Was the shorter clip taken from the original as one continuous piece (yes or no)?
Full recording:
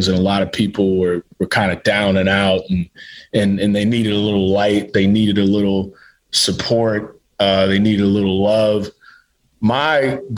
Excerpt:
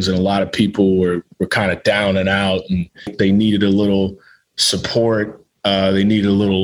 no